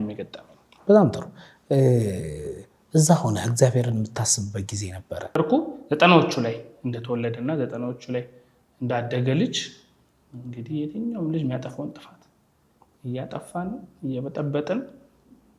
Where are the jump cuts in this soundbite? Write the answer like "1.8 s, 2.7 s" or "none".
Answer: 5.4 s